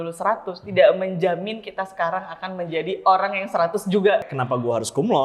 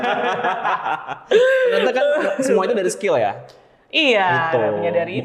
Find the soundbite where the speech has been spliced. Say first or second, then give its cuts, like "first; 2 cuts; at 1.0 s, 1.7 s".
first; 1 cut; at 4.2 s